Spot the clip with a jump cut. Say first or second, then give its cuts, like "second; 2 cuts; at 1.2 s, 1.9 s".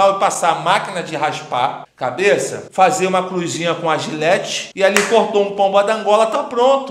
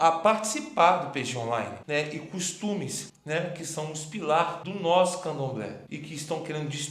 second; 1 cut; at 1.8 s